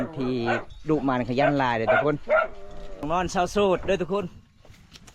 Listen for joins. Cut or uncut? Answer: cut